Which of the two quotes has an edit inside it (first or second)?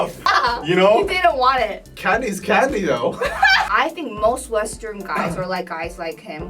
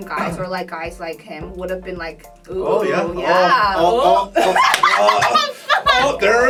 first